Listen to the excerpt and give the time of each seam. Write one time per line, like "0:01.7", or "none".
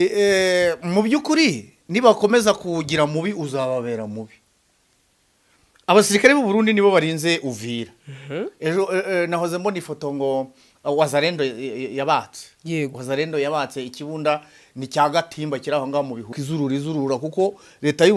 0:16.4

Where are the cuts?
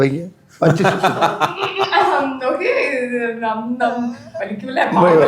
none

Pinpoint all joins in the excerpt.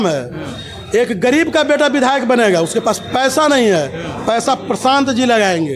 none

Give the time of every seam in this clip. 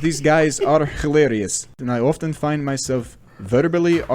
0:01.8

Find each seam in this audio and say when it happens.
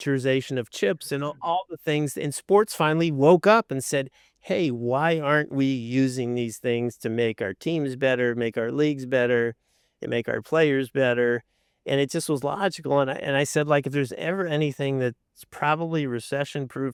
none

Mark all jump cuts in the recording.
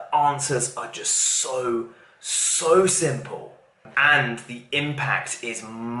0:03.9

